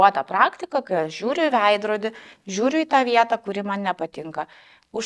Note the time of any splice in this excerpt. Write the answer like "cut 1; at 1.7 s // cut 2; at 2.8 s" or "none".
none